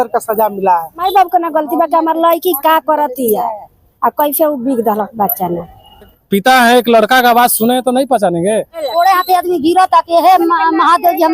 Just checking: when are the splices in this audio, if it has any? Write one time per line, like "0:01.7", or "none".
0:01.0
0:06.2
0:08.8